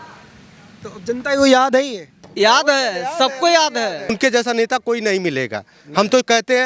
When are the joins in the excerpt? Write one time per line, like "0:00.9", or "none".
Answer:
0:04.2